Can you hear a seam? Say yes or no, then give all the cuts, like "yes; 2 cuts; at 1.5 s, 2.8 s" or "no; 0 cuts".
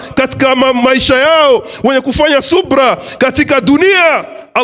no; 0 cuts